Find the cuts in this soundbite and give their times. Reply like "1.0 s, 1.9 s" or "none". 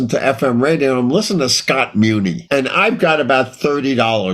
2.4 s